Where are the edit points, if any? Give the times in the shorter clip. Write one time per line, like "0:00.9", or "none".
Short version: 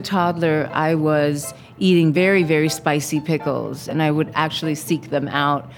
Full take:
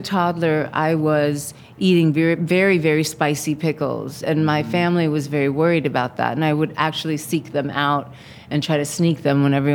0:02.1
0:03.9